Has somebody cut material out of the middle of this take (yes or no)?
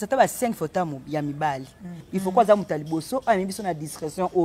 yes